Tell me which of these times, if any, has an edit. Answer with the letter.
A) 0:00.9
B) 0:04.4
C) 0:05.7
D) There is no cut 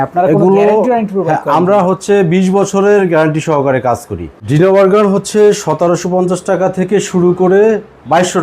B